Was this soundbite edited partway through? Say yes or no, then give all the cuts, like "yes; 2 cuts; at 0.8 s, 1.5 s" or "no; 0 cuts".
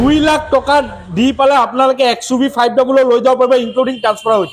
no; 0 cuts